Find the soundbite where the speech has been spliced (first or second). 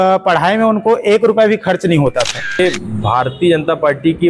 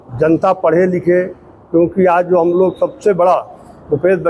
first